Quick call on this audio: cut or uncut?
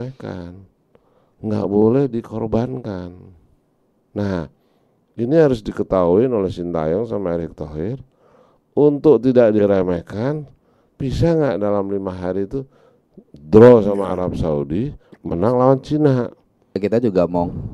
cut